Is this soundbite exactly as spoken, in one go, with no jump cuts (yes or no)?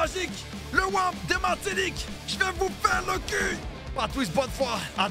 no